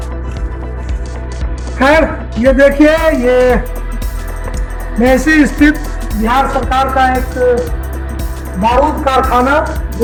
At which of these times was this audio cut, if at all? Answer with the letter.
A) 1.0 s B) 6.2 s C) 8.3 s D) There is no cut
D